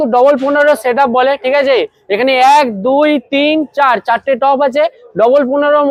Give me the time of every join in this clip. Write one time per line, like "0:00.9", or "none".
none